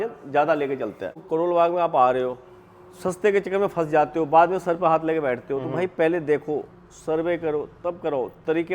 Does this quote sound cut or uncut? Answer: cut